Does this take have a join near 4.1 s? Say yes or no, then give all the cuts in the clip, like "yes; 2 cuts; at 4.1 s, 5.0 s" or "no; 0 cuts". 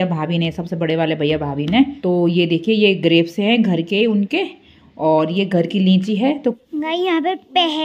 no; 2 cuts; at 2.0 s, 6.4 s